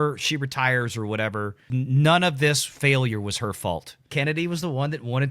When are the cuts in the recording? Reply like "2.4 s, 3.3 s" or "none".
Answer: 1.7 s, 4.0 s